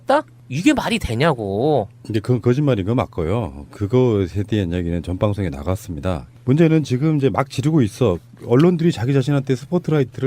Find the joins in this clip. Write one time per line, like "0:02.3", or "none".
0:07.4